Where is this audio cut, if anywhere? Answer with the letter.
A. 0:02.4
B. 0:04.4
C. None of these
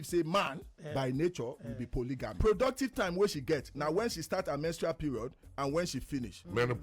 A